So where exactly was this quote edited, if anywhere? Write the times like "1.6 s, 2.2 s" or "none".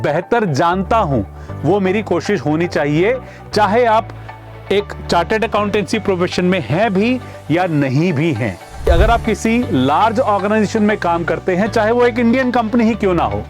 8.9 s